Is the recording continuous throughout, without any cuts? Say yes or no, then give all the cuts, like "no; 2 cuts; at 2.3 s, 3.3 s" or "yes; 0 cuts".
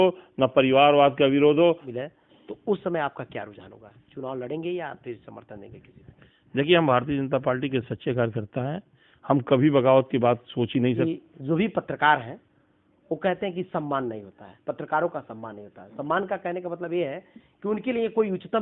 no; 2 cuts; at 1.9 s, 11.0 s